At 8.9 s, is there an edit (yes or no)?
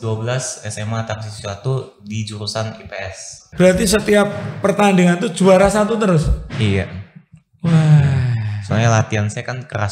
no